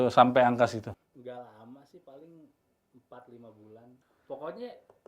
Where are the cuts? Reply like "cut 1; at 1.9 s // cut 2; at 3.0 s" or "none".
cut 1; at 1.1 s // cut 2; at 4.1 s

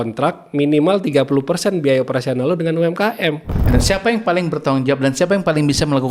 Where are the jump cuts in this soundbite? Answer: cut 1; at 3.6 s

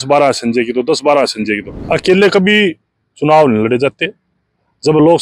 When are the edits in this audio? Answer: cut 1; at 1.9 s

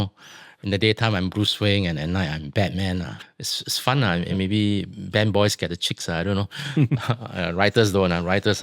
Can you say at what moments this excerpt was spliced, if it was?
cut 1; at 3.2 s

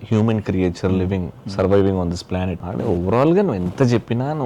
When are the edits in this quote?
cut 1; at 2.6 s

